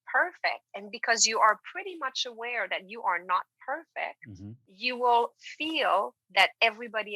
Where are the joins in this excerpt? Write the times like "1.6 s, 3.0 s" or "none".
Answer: 4.7 s